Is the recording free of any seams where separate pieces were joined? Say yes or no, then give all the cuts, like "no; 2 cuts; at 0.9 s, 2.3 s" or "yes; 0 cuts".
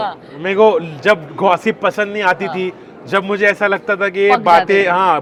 yes; 0 cuts